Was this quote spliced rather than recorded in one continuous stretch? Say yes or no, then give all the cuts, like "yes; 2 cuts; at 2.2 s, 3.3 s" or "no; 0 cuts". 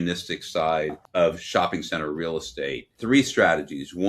yes; 2 cuts; at 1.0 s, 2.9 s